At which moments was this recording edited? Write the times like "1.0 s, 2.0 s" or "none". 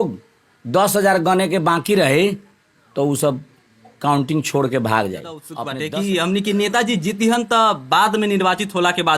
5.6 s